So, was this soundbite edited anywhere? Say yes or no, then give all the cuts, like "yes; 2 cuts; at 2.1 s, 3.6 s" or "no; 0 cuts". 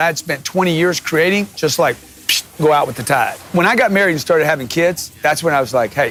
no; 0 cuts